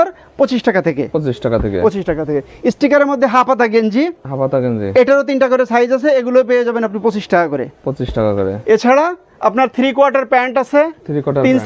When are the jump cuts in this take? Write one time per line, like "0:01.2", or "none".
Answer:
none